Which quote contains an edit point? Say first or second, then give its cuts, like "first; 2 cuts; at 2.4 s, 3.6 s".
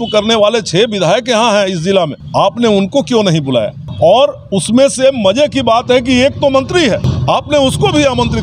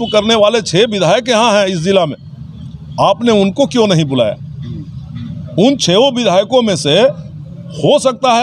first; 3 cuts; at 2.2 s, 3.8 s, 7.1 s